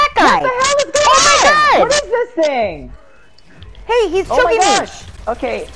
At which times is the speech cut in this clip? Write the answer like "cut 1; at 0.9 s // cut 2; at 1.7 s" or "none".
none